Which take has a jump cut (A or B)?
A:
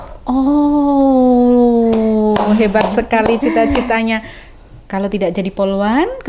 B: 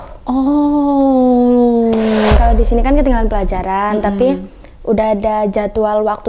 B